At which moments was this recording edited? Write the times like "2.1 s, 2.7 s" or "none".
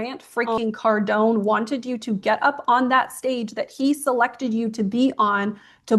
none